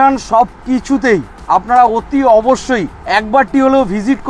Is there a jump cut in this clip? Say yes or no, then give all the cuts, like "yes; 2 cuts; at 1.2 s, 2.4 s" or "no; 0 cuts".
yes; 2 cuts; at 1.3 s, 2.9 s